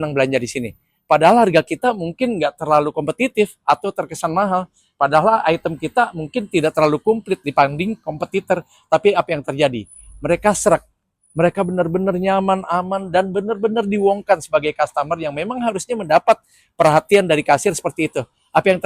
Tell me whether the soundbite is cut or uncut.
uncut